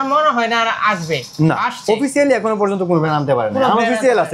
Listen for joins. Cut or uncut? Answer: uncut